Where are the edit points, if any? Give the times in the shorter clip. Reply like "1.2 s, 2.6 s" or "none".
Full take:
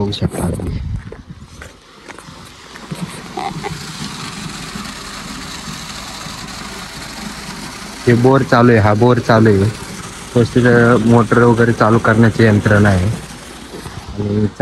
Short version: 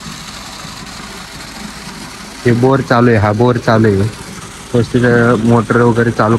none